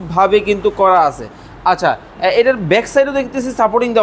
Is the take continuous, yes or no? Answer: yes